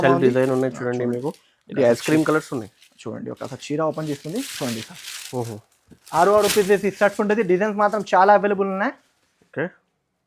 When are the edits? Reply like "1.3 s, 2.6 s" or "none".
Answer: none